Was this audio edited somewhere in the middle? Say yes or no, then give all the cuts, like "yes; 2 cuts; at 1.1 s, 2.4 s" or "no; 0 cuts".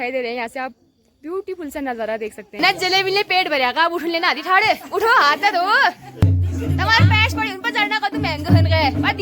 yes; 2 cuts; at 2.6 s, 6.2 s